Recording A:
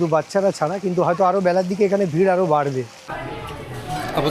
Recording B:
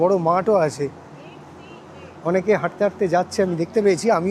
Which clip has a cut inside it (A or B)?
A